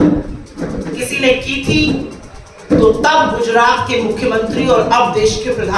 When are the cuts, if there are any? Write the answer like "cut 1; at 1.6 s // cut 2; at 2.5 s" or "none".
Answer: none